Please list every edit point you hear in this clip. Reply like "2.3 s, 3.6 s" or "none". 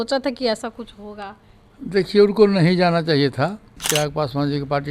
3.8 s